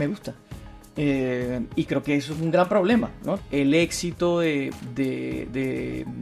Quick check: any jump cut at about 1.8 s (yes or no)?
no